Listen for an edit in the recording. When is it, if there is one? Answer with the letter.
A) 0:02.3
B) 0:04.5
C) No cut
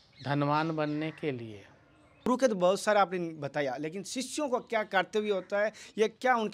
A